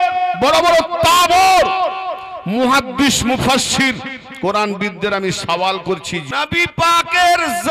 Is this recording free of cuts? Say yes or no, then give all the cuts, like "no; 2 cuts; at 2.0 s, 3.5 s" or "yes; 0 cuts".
no; 1 cut; at 6.2 s